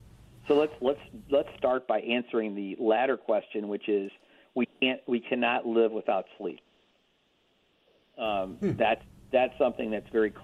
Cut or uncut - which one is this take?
uncut